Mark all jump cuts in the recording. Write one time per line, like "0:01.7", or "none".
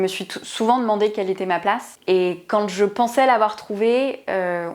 0:01.9